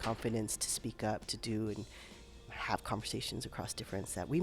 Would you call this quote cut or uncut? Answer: cut